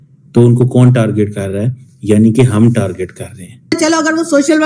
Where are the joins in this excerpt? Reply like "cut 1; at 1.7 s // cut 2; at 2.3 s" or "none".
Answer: cut 1; at 3.7 s